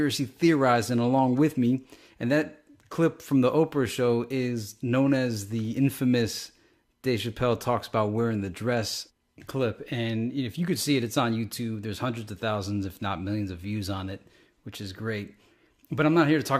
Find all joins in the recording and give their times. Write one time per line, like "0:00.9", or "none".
0:06.3